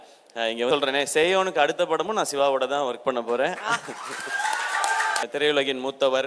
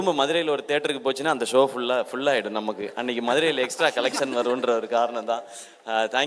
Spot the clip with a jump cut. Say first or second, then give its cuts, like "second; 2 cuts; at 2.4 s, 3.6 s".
first; 2 cuts; at 0.7 s, 5.2 s